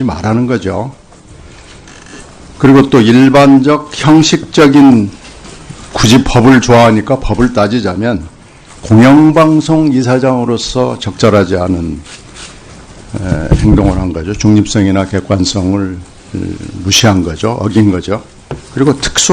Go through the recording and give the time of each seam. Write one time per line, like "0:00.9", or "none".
0:18.2